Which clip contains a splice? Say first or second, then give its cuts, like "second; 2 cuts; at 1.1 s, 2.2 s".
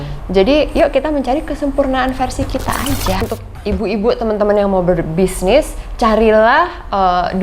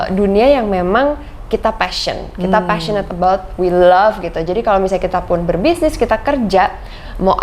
first; 1 cut; at 3.2 s